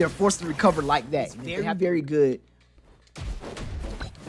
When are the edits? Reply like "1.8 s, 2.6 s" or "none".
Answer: 1.5 s